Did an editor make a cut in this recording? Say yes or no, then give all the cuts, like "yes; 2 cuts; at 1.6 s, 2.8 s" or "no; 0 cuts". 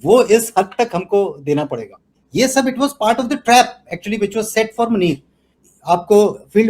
yes; 2 cuts; at 2.1 s, 5.5 s